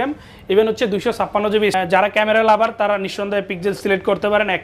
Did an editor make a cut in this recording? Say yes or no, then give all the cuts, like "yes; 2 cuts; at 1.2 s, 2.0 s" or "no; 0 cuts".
yes; 1 cut; at 1.7 s